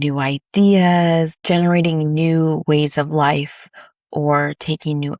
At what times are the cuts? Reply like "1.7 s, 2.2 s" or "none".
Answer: 1.4 s